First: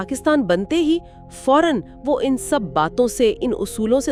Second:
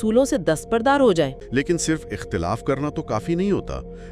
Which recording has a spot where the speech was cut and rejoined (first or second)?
second